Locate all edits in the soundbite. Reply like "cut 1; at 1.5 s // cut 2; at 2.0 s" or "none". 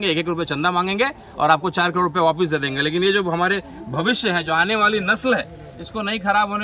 none